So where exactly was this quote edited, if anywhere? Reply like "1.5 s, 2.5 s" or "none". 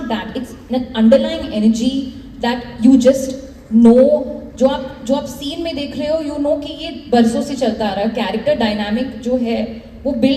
none